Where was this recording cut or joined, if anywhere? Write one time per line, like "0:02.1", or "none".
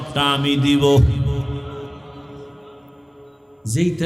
none